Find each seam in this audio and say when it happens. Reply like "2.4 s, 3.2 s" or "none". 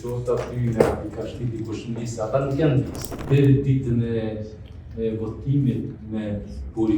3.2 s